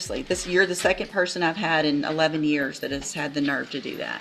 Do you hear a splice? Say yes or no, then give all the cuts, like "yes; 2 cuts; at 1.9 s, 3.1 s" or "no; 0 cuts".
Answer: no; 0 cuts